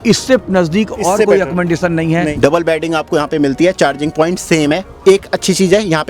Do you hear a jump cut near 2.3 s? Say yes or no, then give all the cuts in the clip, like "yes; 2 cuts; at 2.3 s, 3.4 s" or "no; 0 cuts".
yes; 1 cut; at 2.3 s